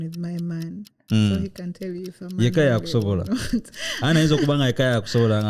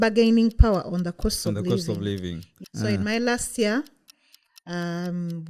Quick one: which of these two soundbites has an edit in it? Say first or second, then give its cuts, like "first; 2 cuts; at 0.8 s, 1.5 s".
second; 1 cut; at 2.5 s